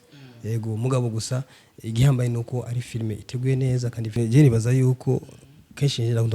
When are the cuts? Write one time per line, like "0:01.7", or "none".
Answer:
0:04.2